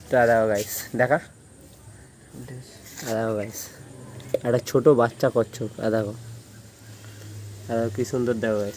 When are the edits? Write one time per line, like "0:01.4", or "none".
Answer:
none